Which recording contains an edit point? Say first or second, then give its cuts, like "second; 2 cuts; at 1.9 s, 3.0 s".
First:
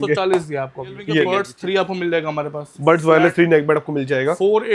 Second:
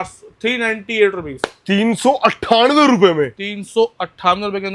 first; 1 cut; at 1.4 s